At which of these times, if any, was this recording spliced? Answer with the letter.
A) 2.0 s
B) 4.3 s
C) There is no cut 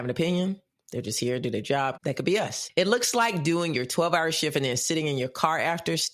A